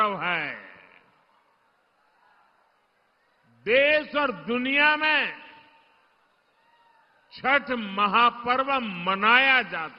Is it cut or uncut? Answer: cut